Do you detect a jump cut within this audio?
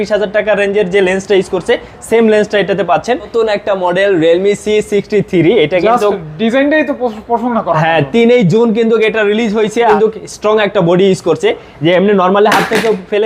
yes; 2 cuts; at 3.3 s, 9.8 s

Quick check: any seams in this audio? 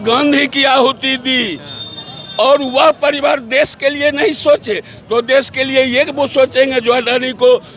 no; 0 cuts

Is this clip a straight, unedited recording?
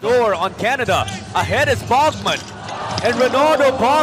yes; 0 cuts

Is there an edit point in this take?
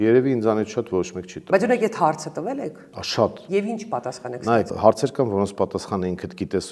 yes; 1 cut; at 4.7 s

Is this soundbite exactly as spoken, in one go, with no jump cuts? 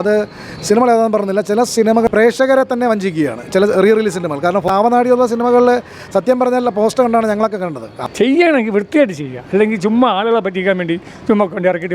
no; 3 cuts; at 1.9 s, 4.7 s, 8.1 s

